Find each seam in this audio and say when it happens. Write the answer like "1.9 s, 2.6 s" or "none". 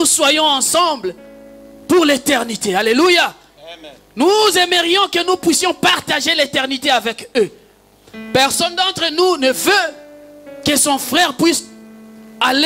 none